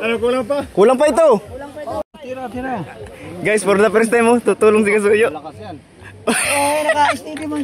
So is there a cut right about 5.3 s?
no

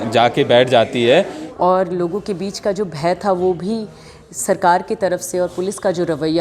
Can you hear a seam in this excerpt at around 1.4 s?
yes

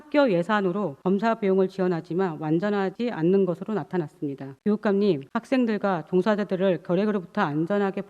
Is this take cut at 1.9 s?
no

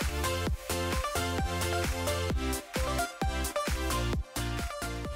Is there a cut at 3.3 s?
no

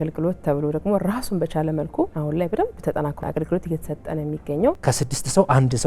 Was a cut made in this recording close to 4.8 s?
yes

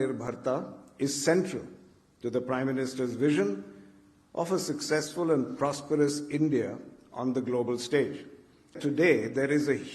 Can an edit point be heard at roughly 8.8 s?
yes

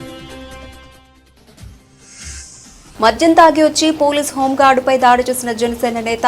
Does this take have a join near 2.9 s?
yes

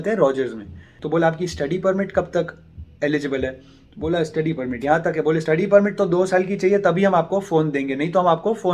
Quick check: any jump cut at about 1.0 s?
yes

